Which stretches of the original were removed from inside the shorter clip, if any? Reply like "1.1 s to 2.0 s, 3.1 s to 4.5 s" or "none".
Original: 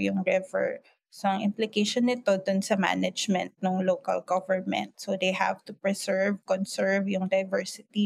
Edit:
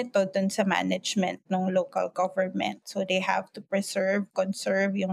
none